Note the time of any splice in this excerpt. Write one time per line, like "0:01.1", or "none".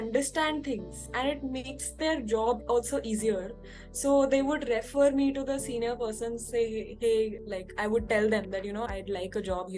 0:08.9